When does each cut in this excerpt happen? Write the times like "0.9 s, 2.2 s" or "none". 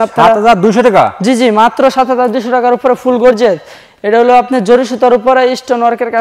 none